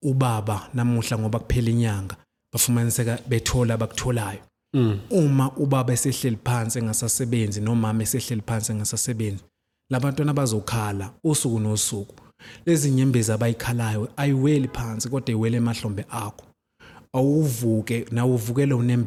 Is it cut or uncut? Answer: uncut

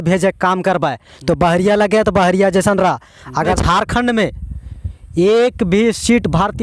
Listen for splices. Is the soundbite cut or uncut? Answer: cut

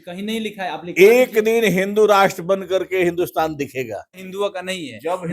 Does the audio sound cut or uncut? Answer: cut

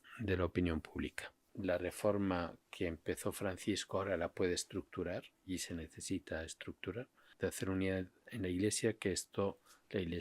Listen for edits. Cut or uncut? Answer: cut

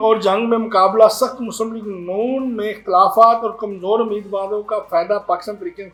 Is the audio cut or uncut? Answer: uncut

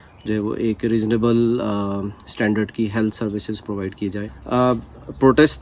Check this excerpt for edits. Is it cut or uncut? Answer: cut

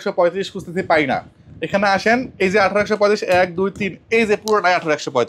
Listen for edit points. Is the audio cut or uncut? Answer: uncut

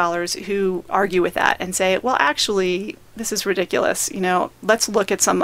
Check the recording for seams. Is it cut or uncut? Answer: uncut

